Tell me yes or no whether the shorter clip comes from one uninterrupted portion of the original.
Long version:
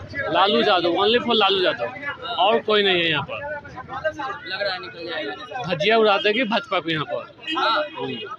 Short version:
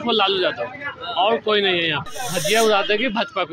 no